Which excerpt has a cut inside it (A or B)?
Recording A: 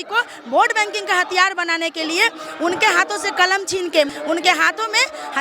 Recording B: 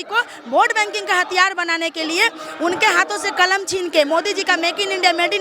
A